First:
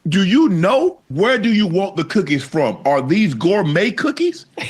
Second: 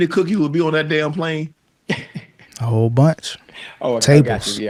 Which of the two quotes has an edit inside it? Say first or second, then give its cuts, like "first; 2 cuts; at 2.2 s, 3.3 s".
first; 1 cut; at 1.0 s